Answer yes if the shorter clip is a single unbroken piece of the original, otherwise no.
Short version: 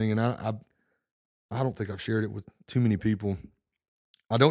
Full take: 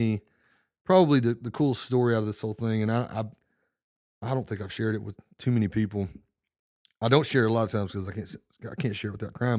yes